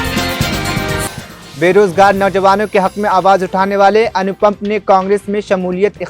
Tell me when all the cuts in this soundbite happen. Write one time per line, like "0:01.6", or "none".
0:01.1